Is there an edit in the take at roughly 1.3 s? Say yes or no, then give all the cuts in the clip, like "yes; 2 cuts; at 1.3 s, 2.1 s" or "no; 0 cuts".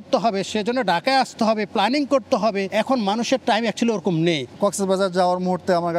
no; 2 cuts; at 2.7 s, 4.5 s